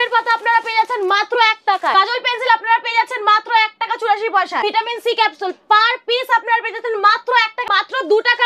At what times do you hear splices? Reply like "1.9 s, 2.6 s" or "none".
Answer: 1.9 s, 4.6 s, 7.6 s